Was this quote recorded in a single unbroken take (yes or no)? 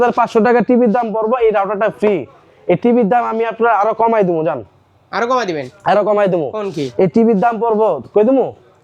yes